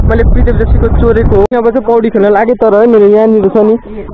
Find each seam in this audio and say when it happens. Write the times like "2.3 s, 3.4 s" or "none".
1.5 s